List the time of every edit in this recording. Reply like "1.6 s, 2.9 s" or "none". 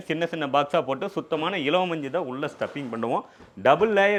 none